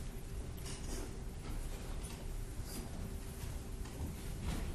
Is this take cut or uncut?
cut